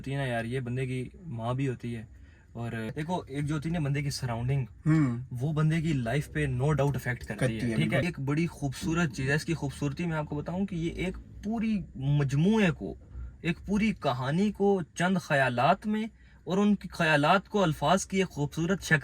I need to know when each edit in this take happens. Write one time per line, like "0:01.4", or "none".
0:02.9
0:08.0

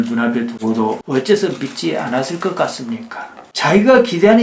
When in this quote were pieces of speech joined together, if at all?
0:03.4

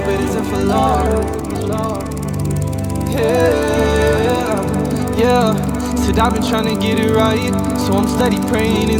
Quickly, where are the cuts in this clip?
none

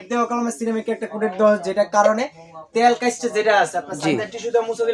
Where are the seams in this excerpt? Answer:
none

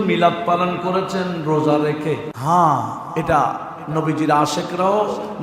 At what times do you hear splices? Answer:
0:02.3

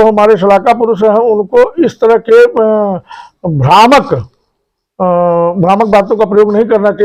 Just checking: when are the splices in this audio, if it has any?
none

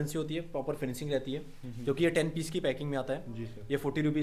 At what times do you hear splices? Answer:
none

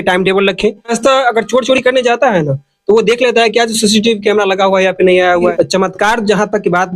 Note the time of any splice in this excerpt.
0:00.9
0:05.5

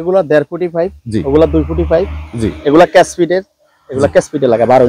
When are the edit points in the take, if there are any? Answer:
none

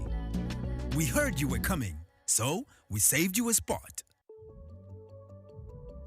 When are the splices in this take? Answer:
0:04.3

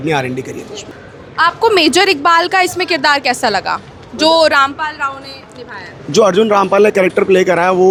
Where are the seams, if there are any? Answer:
none

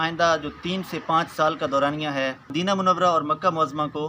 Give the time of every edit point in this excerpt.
0:02.5

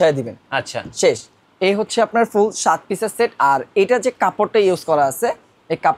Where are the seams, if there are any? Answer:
none

